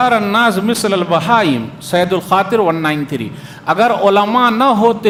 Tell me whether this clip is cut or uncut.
uncut